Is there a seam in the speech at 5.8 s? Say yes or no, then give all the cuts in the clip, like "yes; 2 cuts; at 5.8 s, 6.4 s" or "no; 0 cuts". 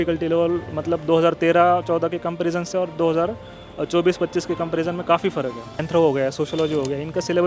yes; 1 cut; at 5.8 s